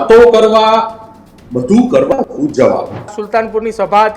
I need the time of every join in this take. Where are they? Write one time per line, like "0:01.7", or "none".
0:03.2